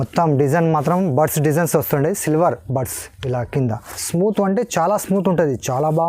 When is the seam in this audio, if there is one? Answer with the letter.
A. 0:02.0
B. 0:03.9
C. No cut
B